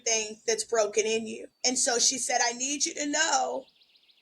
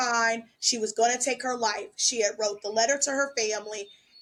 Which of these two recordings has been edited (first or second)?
first